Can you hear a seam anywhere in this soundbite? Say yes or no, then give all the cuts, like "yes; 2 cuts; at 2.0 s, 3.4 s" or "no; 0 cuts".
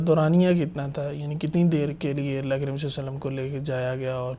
no; 0 cuts